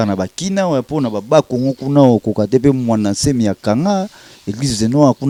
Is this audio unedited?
yes; 0 cuts

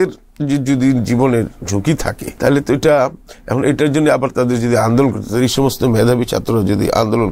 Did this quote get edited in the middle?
yes; 1 cut; at 2.2 s

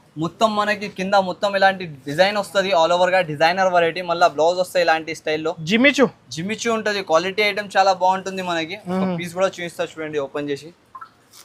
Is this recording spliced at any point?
no; 0 cuts

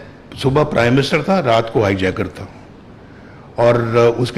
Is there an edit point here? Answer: no; 0 cuts

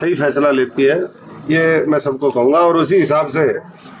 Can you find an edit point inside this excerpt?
no; 0 cuts

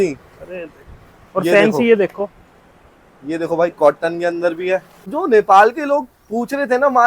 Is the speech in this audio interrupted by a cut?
yes; 1 cut; at 5.1 s

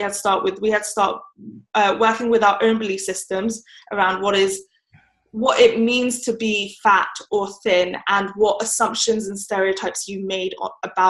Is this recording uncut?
yes; 0 cuts

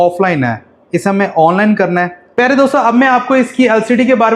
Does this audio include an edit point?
yes; 1 cut; at 2.2 s

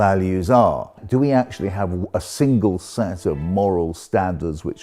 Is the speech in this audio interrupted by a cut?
yes; 1 cut; at 0.9 s

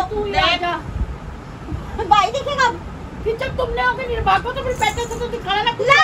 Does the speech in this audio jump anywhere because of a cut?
no; 0 cuts

